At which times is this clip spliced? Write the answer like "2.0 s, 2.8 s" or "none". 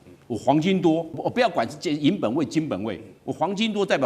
1.2 s